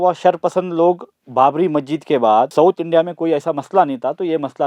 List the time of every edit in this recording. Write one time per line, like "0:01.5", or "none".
0:02.5